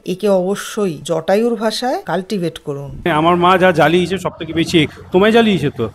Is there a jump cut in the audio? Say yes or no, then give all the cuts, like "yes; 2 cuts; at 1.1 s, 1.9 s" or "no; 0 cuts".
yes; 1 cut; at 3.1 s